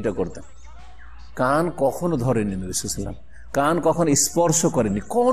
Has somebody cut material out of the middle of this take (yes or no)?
no